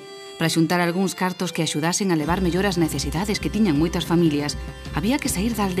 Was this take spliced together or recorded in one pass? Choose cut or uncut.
uncut